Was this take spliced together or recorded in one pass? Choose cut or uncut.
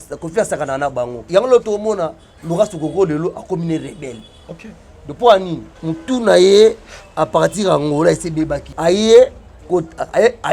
cut